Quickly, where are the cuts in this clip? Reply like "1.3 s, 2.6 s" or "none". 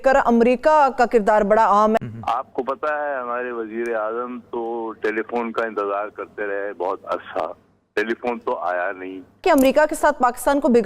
2.0 s, 9.4 s

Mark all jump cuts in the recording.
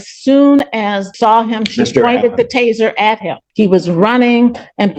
1.1 s, 3.4 s

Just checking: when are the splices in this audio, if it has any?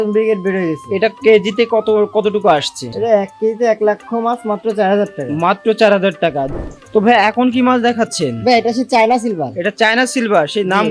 2.8 s, 6.5 s

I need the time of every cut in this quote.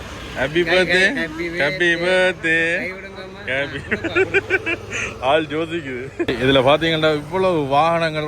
6.3 s

